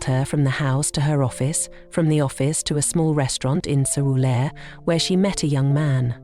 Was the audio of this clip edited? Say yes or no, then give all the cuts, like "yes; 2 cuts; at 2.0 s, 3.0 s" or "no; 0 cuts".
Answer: no; 0 cuts